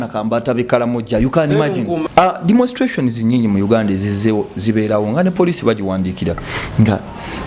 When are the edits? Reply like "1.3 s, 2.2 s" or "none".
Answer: 2.0 s